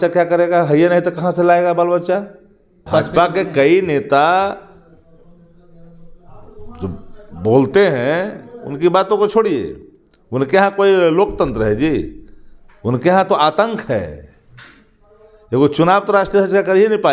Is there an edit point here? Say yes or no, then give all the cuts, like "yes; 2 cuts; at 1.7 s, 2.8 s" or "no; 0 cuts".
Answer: yes; 1 cut; at 2.8 s